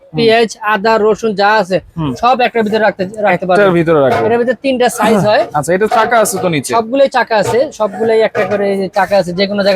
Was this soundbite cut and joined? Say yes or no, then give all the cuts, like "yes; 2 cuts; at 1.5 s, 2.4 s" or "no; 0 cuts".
no; 0 cuts